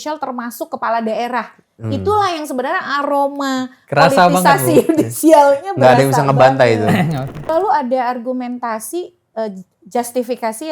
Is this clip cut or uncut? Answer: cut